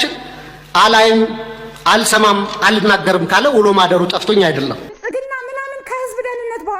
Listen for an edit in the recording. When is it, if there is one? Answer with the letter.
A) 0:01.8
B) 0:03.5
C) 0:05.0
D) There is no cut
C